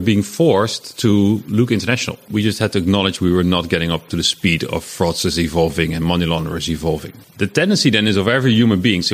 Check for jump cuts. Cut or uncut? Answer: cut